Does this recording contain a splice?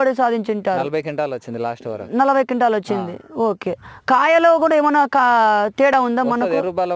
no; 0 cuts

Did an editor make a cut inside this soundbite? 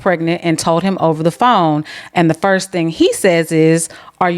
no; 0 cuts

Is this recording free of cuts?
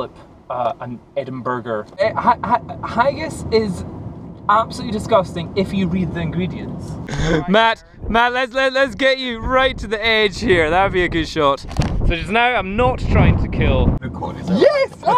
no; 3 cuts; at 2.0 s, 7.1 s, 14.1 s

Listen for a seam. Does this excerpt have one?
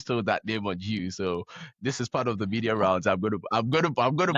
no; 0 cuts

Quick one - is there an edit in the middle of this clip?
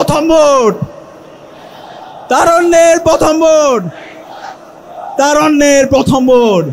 no; 0 cuts

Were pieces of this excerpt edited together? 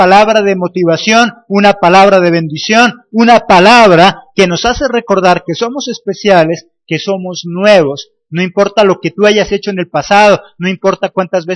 no; 0 cuts

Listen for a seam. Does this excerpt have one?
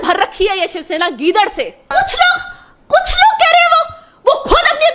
yes; 1 cut; at 1.9 s

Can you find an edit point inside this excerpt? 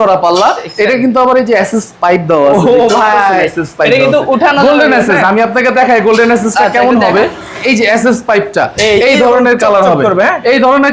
no; 0 cuts

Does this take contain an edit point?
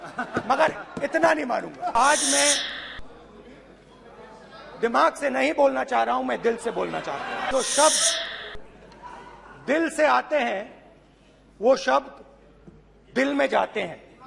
yes; 2 cuts; at 1.9 s, 7.5 s

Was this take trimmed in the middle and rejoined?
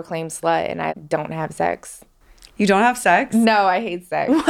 yes; 1 cut; at 0.9 s

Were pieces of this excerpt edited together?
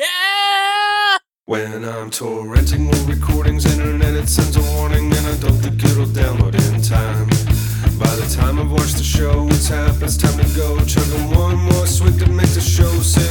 yes; 1 cut; at 1.3 s

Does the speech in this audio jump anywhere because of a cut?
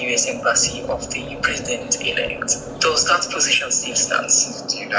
no; 0 cuts

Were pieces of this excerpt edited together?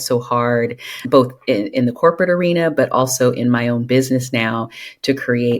yes; 1 cut; at 0.9 s

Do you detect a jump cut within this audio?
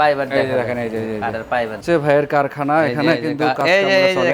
yes; 1 cut; at 1.8 s

